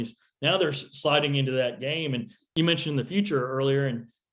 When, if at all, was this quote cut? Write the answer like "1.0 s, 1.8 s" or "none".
2.5 s